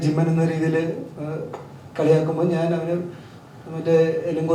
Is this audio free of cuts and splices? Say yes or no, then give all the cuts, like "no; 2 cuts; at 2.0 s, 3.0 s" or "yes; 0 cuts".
yes; 0 cuts